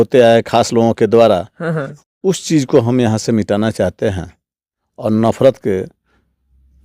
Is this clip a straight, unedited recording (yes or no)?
yes